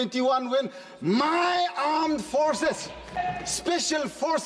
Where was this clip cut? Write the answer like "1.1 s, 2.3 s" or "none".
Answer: 3.2 s